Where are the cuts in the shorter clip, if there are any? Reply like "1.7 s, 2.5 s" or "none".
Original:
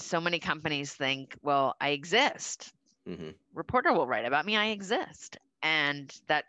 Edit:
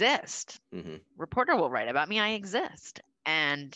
1.0 s